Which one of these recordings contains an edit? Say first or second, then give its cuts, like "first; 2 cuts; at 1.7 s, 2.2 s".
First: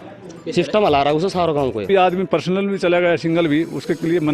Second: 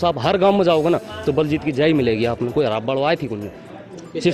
first; 1 cut; at 1.9 s